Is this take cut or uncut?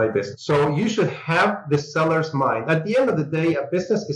uncut